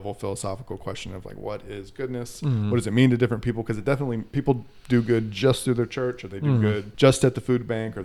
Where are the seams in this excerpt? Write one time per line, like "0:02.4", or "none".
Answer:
0:06.9

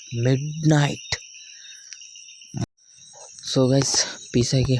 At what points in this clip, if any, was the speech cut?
0:02.6

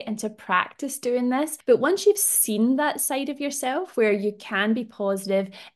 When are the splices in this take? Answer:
0:01.6

